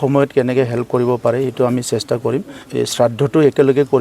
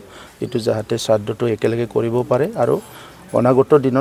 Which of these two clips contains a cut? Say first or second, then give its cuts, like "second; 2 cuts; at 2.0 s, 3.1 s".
first; 1 cut; at 2.6 s